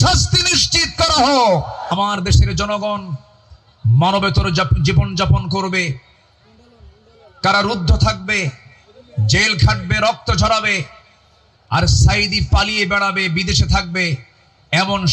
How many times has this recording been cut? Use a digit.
1